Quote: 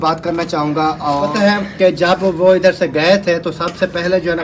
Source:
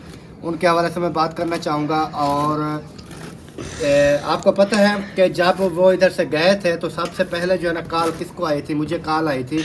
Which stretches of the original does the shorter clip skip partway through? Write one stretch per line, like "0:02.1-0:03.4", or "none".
0:02.4-0:04.7